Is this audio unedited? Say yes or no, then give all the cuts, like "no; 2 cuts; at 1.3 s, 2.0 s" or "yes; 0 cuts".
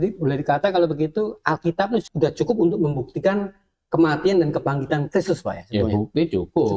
no; 1 cut; at 2.1 s